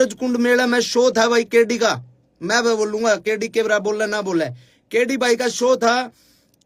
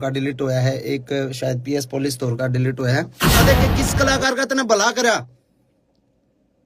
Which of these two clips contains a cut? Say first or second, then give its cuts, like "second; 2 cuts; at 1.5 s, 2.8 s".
second; 1 cut; at 3.4 s